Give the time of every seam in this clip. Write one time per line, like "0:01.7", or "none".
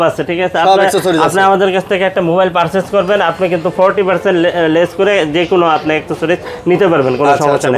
none